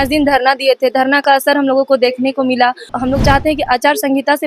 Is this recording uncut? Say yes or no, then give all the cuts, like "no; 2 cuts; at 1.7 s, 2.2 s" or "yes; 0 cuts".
no; 1 cut; at 2.9 s